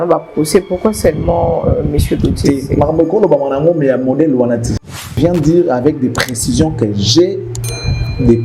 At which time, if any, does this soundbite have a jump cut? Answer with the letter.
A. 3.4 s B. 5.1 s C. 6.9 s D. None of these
B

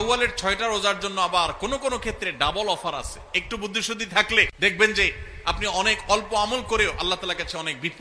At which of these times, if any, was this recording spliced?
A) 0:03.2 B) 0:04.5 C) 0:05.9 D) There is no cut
B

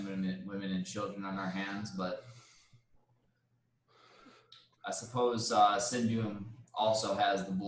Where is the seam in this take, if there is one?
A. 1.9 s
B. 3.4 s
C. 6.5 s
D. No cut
D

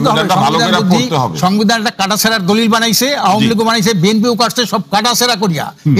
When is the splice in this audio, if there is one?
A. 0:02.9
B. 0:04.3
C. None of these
C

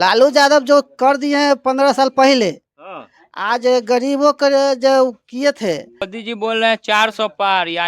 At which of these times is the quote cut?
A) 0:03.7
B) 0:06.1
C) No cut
B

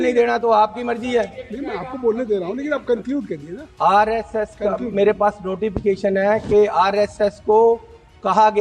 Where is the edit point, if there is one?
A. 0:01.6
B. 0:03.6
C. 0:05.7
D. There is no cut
D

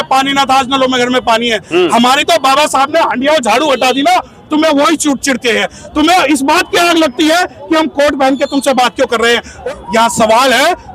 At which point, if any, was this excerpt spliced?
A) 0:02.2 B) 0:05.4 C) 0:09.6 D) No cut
C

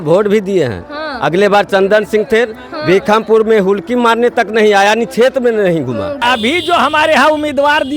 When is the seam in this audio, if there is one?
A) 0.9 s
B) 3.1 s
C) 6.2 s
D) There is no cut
C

